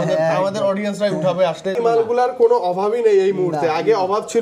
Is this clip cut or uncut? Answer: cut